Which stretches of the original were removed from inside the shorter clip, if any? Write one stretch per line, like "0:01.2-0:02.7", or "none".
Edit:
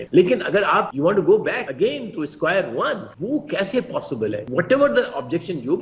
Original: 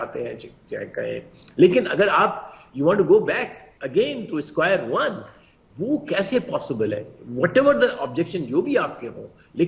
0:02.4-0:02.7
0:03.5-0:03.8
0:05.3-0:05.7
0:07.0-0:07.3